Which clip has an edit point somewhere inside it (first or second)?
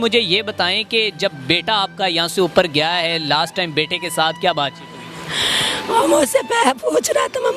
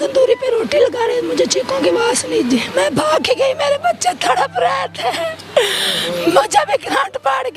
second